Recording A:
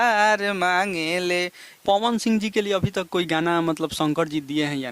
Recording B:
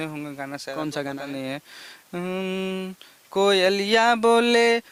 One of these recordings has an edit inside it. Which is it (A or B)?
A